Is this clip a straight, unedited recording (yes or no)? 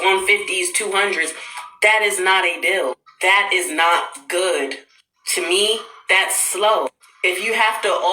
no